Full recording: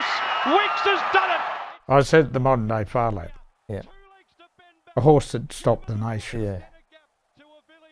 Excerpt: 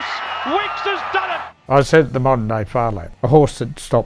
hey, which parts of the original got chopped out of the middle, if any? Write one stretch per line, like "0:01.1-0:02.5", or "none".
0:01.5-0:01.7
0:03.2-0:04.8